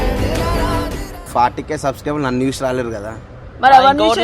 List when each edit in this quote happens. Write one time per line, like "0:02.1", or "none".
0:01.2